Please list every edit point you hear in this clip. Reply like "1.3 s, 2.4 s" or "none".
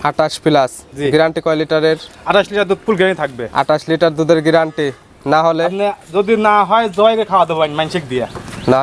none